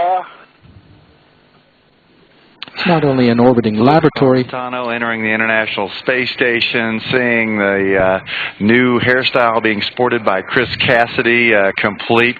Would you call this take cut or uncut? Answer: uncut